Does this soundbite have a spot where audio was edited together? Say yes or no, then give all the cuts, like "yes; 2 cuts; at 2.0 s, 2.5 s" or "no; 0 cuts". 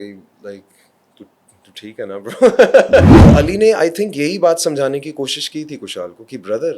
yes; 1 cut; at 3.1 s